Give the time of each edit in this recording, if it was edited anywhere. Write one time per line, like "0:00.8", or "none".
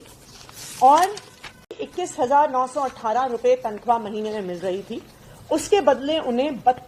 0:01.7

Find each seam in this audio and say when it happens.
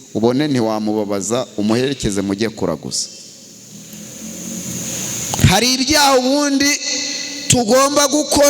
none

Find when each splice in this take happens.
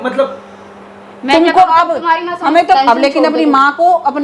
0:02.8

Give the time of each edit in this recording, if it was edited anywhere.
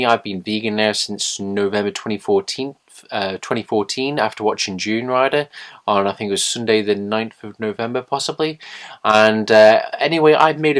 0:04.6

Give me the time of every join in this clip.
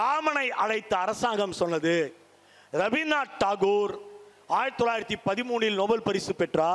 none

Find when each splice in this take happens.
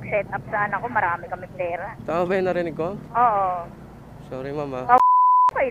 0:01.9
0:03.0

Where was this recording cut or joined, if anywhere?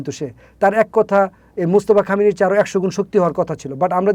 none

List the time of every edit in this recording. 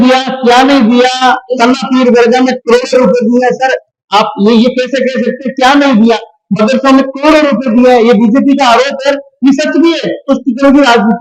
none

